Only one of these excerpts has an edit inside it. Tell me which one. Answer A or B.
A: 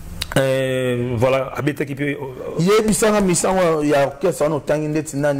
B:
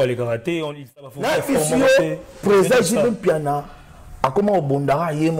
B